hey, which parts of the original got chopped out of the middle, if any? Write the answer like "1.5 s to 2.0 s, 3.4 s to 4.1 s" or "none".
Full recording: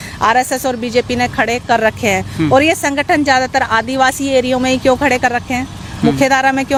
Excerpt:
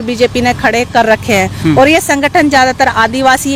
none